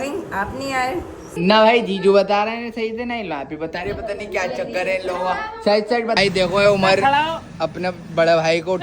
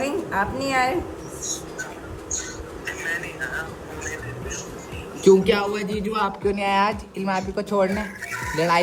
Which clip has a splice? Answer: first; 2 cuts; at 1.3 s, 6.2 s

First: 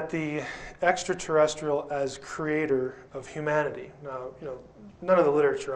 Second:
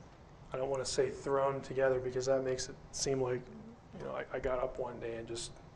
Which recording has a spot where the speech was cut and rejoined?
first; 1 cut; at 2.4 s

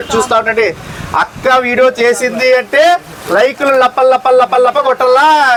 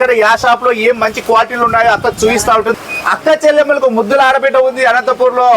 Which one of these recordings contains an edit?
second; 1 cut; at 2.8 s

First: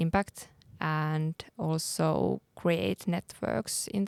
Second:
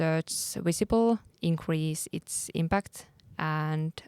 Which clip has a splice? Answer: second; 1 cut; at 1.3 s

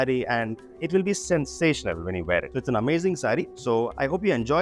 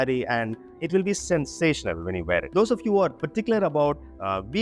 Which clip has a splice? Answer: second; 1 cut; at 2.5 s

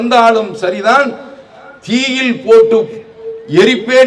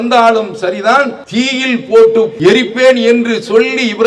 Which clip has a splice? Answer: second; 2 cuts; at 1.2 s, 2.3 s

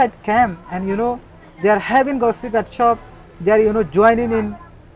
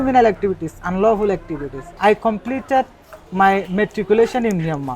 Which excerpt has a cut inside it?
second; 1 cut; at 2.0 s

